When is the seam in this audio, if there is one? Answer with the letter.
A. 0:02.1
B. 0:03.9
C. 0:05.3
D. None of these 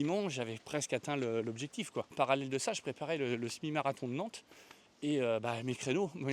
A